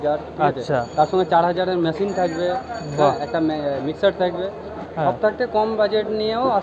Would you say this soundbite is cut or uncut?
cut